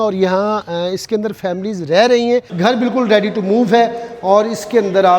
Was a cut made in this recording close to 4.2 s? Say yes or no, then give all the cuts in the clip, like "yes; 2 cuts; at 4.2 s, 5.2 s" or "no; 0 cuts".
no; 1 cut; at 2.5 s